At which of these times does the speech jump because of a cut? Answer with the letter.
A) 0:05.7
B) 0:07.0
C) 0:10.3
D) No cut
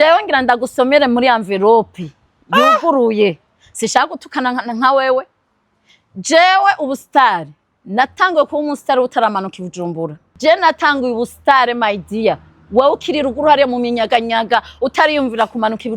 C